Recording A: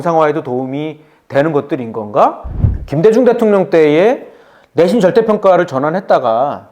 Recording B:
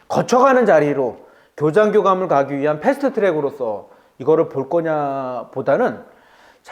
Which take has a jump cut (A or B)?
A